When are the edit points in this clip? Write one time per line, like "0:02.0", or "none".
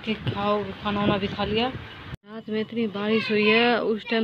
0:01.9